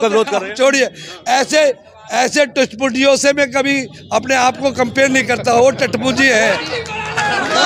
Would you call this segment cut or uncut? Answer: uncut